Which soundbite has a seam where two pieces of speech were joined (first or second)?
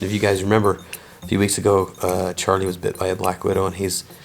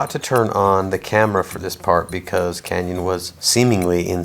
second